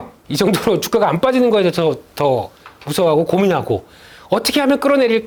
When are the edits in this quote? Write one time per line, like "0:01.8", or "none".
none